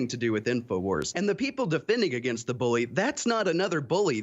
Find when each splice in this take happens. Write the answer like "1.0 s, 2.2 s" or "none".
1.1 s